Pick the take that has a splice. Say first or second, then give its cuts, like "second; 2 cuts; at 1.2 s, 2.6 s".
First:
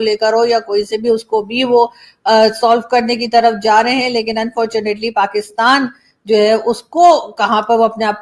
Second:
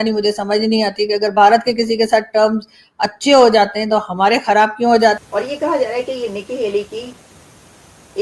second; 1 cut; at 5.2 s